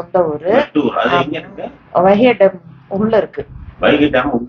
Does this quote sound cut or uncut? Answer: uncut